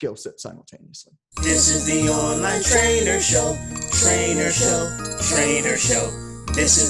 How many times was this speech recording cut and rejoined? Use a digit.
1